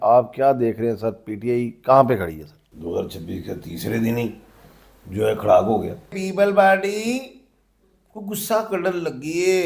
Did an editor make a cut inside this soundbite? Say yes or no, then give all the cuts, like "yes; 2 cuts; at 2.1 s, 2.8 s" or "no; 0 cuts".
yes; 2 cuts; at 2.6 s, 6.2 s